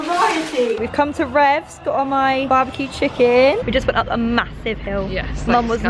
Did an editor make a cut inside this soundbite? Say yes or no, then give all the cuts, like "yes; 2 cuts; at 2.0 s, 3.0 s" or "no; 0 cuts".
yes; 3 cuts; at 0.8 s, 2.4 s, 3.6 s